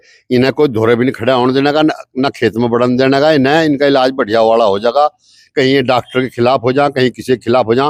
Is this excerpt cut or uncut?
uncut